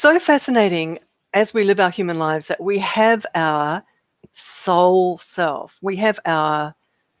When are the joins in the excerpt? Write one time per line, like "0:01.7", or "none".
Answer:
0:01.0